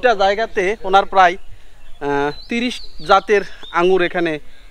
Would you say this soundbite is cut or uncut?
uncut